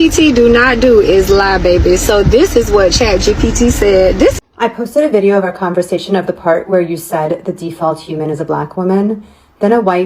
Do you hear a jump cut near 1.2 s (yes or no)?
no